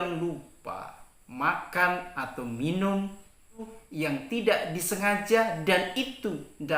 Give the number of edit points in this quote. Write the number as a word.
one